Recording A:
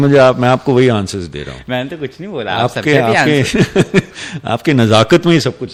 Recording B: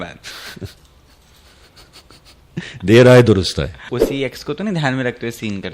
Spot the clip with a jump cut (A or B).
B